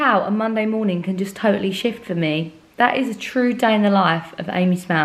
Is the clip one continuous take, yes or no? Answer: yes